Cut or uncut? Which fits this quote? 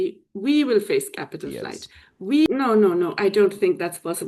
cut